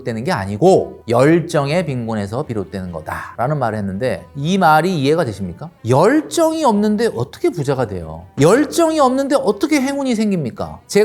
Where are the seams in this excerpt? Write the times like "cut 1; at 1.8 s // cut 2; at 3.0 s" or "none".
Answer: none